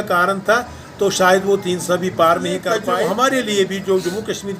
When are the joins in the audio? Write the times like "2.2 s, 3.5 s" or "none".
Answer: 2.9 s